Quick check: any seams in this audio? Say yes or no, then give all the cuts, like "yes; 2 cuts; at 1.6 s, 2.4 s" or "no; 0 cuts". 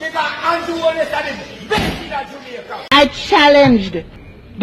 yes; 1 cut; at 2.8 s